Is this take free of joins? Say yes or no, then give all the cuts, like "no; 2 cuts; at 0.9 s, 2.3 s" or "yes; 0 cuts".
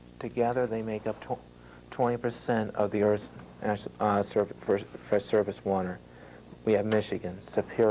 no; 1 cut; at 4.9 s